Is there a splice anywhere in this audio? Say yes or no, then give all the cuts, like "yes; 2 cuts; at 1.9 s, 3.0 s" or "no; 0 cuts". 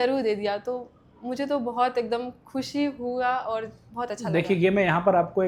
no; 0 cuts